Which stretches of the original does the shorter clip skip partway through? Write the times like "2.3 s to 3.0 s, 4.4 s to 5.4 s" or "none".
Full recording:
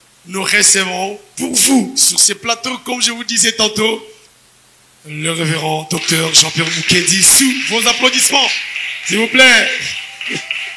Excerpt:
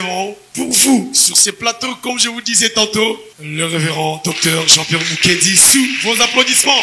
4.2 s to 5.0 s